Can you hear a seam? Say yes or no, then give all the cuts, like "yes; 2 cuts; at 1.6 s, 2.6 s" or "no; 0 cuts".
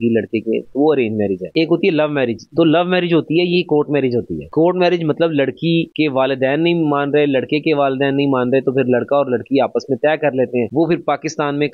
no; 0 cuts